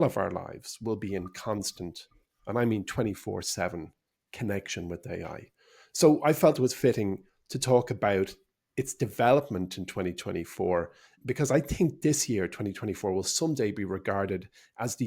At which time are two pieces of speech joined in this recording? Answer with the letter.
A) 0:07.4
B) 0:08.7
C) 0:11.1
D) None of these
C